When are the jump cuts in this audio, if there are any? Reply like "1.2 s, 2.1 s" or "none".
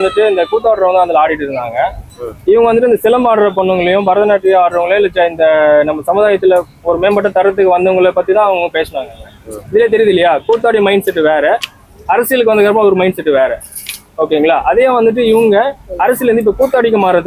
none